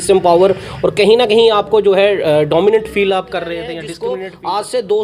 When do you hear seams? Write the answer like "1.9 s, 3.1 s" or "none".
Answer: 3.9 s